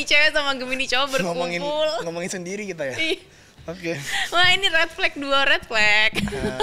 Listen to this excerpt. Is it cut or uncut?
uncut